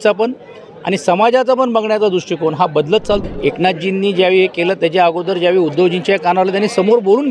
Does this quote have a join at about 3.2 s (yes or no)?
yes